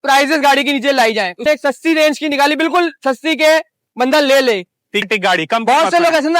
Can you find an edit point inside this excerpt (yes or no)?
yes